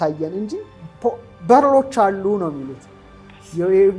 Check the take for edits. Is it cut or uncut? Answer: uncut